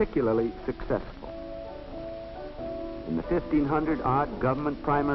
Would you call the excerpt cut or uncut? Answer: uncut